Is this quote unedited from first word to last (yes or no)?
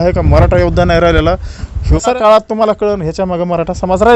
no